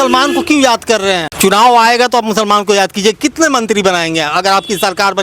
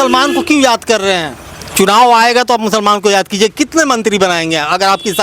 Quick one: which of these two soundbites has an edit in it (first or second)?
first